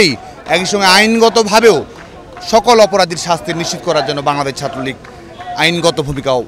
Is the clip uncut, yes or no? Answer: yes